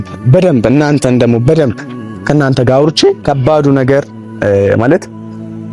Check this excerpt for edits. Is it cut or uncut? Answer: cut